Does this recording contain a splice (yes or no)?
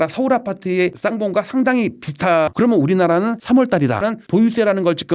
yes